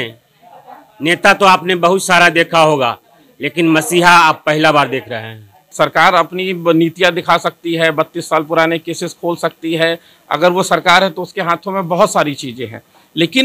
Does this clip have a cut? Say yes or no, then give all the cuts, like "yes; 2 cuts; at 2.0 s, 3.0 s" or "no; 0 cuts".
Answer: yes; 1 cut; at 5.6 s